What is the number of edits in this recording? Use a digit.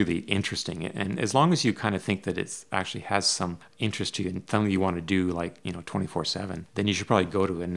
2